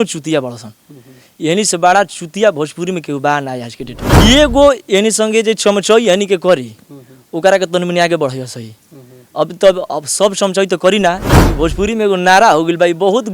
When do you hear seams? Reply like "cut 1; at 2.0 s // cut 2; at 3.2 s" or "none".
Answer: cut 1; at 4.1 s // cut 2; at 11.4 s